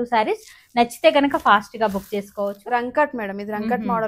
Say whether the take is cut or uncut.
cut